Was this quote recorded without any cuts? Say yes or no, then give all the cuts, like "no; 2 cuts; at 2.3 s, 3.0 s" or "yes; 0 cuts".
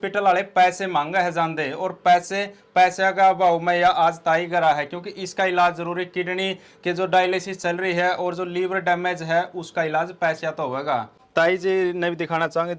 no; 1 cut; at 11.2 s